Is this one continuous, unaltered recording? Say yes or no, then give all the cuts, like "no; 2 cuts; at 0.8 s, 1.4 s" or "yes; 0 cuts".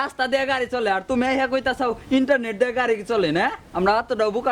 yes; 0 cuts